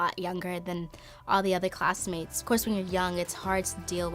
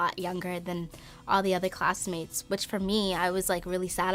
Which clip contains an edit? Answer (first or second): first